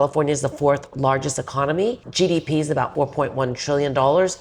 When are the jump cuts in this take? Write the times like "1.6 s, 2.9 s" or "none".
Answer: 2.1 s, 2.9 s